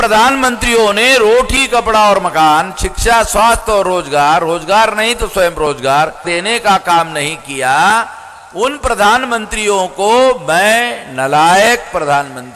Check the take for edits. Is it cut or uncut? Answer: cut